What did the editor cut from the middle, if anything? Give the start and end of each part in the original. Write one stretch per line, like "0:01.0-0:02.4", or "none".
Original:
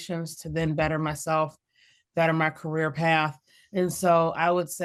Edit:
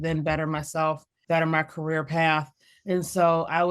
0:01.6-0:02.0